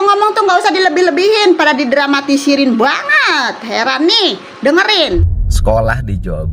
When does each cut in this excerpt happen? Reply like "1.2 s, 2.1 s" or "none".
5.2 s